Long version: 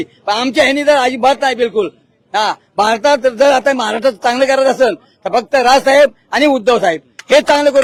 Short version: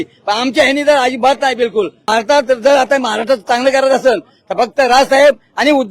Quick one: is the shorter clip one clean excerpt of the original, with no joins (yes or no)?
no